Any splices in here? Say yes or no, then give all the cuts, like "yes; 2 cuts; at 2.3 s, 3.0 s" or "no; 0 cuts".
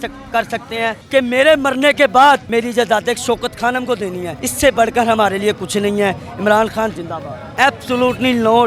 yes; 3 cuts; at 1.0 s, 2.5 s, 7.5 s